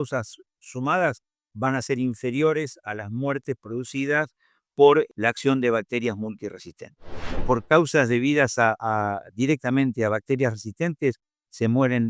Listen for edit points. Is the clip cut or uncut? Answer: cut